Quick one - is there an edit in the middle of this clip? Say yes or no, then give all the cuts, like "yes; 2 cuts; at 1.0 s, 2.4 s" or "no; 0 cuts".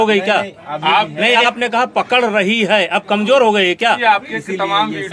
yes; 1 cut; at 4.0 s